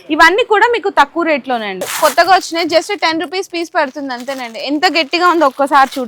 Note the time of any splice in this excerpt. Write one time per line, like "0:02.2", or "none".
0:01.9